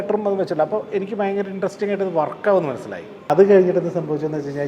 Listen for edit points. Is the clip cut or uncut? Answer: cut